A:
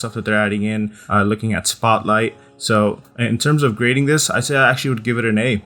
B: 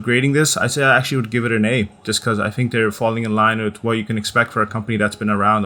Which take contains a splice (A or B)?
A